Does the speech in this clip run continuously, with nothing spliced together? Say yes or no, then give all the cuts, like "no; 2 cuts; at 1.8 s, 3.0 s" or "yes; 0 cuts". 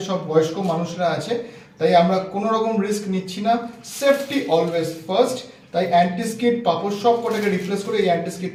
yes; 0 cuts